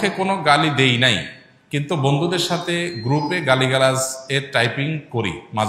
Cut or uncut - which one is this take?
uncut